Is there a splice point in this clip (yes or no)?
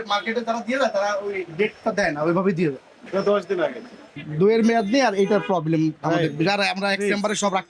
yes